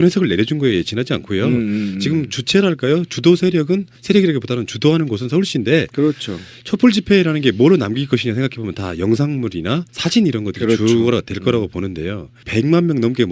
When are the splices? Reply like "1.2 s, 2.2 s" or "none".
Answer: none